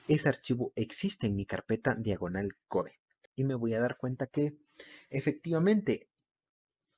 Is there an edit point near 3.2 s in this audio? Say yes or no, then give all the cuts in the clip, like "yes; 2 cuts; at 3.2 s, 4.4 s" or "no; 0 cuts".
yes; 1 cut; at 3.2 s